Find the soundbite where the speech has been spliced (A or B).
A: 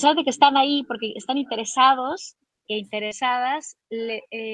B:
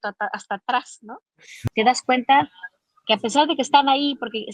B